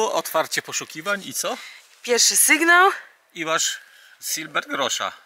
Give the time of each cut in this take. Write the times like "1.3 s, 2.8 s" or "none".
none